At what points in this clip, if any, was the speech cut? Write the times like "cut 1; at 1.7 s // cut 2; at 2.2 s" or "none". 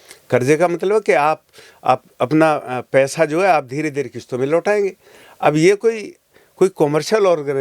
none